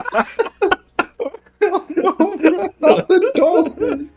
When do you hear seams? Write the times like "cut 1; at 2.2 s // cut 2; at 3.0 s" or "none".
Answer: cut 1; at 1.2 s

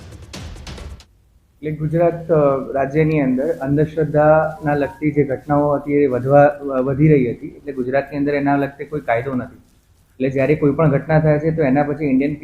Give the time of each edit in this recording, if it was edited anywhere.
cut 1; at 0.9 s

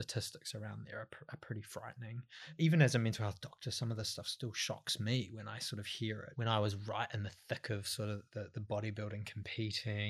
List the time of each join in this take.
cut 1; at 2.5 s // cut 2; at 6.3 s

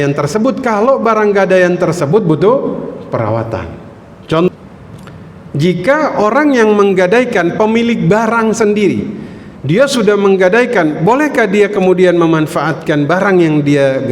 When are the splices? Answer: cut 1; at 4.5 s

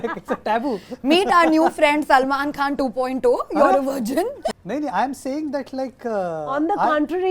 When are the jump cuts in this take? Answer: cut 1; at 4.6 s

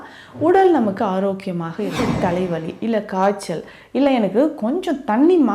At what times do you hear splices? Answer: cut 1; at 2.0 s

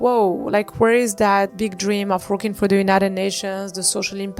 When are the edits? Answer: cut 1; at 1.5 s

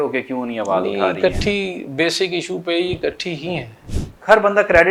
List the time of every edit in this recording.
none

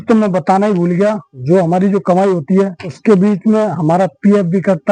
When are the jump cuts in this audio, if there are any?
cut 1; at 1.3 s // cut 2; at 2.9 s

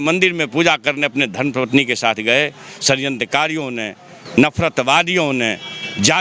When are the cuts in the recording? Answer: none

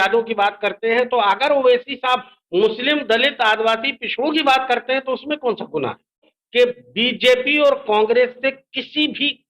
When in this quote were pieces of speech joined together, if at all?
cut 1; at 6.3 s

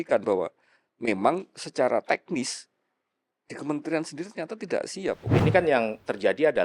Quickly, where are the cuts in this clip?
cut 1; at 5.4 s

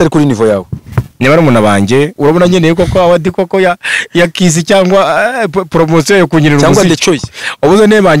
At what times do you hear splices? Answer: cut 1; at 2.1 s

